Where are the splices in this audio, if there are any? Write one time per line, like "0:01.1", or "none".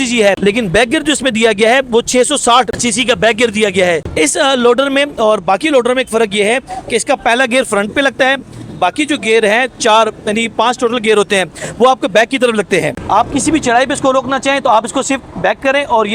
0:04.1
0:13.0